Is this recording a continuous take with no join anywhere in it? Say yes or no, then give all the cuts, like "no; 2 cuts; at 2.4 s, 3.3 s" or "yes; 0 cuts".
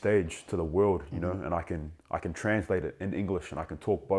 yes; 0 cuts